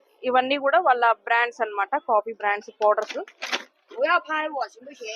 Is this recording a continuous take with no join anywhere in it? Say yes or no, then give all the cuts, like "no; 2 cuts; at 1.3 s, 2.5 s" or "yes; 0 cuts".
yes; 0 cuts